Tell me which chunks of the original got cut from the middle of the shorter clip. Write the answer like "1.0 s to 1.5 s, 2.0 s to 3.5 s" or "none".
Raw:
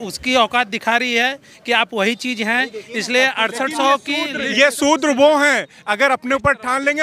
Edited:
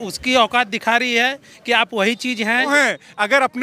2.7 s to 5.4 s